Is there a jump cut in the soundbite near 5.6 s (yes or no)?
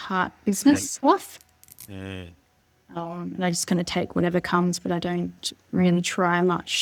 no